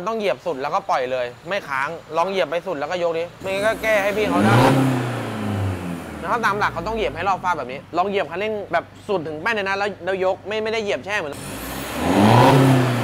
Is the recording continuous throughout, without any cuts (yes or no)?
no